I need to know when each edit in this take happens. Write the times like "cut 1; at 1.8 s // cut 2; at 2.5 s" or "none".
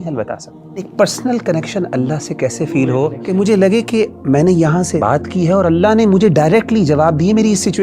cut 1; at 0.9 s // cut 2; at 3.2 s // cut 3; at 5.0 s